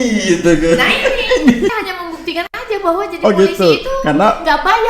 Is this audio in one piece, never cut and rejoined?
no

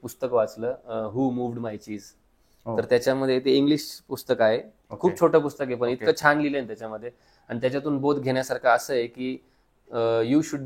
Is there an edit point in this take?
no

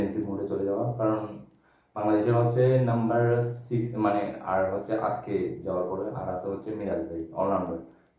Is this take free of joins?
yes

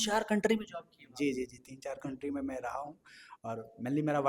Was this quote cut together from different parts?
no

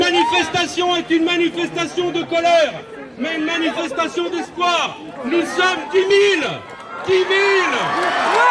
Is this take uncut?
yes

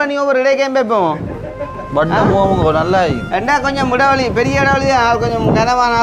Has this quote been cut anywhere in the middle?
no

